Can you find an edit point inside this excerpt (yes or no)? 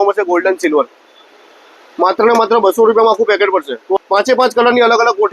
yes